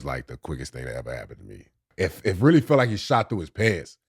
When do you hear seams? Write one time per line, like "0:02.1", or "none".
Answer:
0:01.9